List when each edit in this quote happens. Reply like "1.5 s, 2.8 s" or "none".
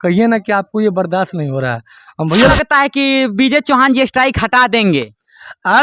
2.5 s